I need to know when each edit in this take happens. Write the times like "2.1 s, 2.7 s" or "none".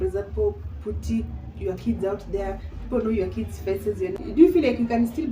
4.2 s